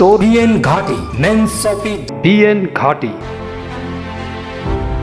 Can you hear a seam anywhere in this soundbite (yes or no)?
yes